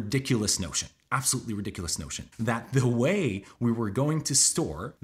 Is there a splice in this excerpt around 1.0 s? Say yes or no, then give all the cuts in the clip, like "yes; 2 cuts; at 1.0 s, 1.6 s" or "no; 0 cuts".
no; 1 cut; at 2.2 s